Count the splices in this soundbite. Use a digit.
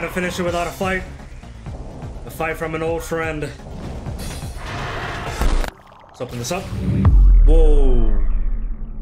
1